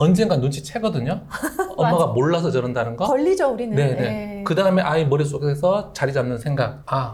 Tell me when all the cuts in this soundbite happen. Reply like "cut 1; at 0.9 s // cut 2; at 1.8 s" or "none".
none